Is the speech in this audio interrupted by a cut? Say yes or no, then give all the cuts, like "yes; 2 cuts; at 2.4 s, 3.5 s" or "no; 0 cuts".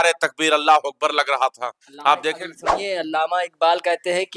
no; 0 cuts